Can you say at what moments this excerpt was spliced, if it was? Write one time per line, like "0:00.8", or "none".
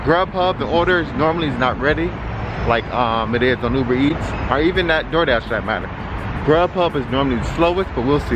none